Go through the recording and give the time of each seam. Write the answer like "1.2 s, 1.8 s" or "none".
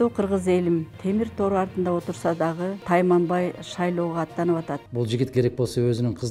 0.9 s, 2.8 s, 4.8 s